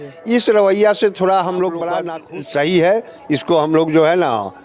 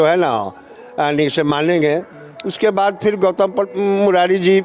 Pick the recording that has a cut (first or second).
first